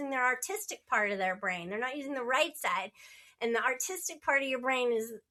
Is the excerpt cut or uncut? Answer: uncut